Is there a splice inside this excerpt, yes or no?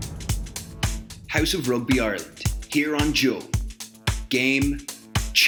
no